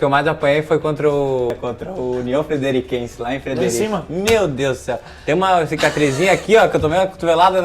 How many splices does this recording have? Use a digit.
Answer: 1